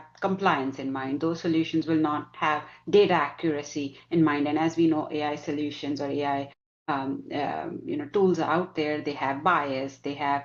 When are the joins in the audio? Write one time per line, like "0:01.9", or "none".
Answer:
none